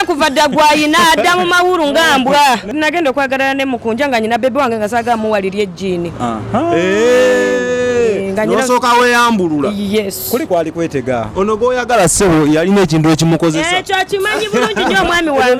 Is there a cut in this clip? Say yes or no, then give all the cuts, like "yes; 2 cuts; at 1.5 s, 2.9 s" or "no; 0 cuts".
yes; 1 cut; at 2.7 s